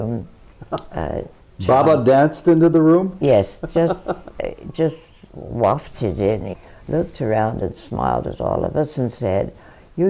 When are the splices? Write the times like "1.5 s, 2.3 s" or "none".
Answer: 6.5 s

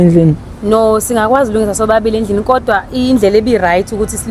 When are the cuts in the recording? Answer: none

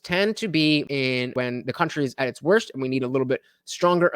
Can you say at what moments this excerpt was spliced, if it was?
0.9 s

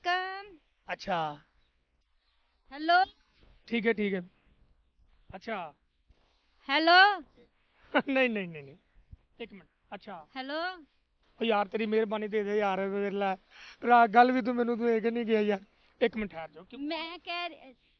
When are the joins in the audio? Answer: none

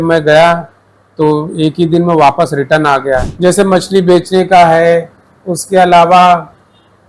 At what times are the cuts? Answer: 3.3 s

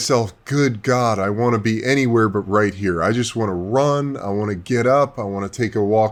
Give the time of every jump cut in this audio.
none

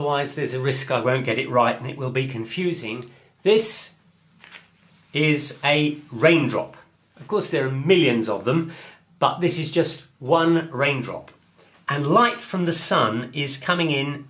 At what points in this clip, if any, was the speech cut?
4.0 s

